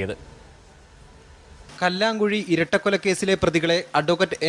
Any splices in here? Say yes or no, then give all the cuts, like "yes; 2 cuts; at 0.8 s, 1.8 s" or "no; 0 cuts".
no; 0 cuts